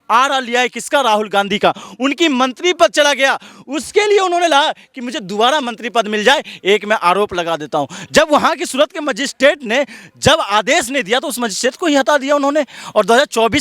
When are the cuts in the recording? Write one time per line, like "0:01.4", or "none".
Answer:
none